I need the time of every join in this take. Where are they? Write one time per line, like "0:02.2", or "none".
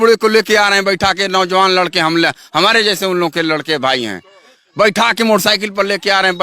none